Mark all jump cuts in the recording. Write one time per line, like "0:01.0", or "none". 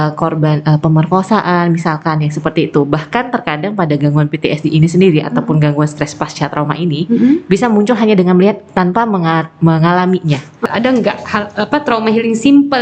0:10.6